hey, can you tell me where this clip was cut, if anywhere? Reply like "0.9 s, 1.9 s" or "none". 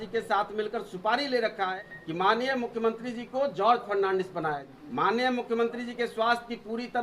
1.7 s, 4.7 s